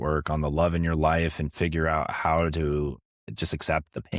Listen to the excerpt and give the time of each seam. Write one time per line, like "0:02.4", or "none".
0:03.3

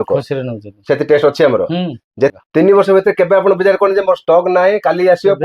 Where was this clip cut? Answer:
0:02.3

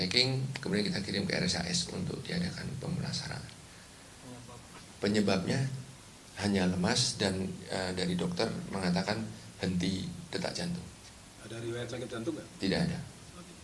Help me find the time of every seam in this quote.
0:07.4
0:11.7

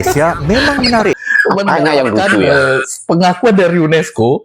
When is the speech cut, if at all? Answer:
0:01.2

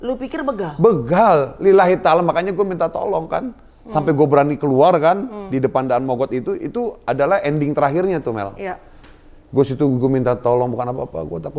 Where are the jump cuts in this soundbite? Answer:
none

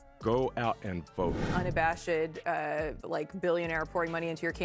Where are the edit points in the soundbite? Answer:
0:01.5

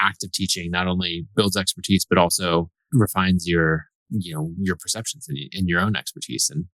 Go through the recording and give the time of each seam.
0:02.8
0:03.9

